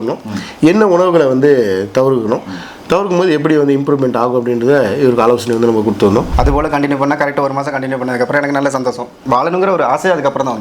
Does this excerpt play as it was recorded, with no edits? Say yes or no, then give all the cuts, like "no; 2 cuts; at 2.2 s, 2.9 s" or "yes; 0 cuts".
no; 2 cuts; at 6.3 s, 9.2 s